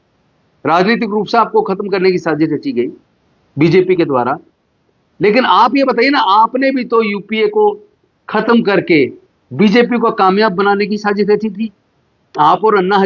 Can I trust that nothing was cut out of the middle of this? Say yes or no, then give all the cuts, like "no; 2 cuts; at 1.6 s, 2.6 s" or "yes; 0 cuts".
yes; 0 cuts